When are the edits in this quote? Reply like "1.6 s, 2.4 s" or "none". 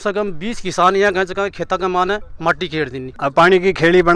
3.1 s